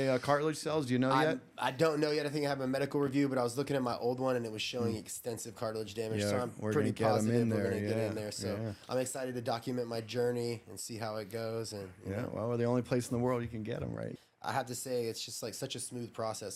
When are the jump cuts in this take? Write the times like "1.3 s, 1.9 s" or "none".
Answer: 14.1 s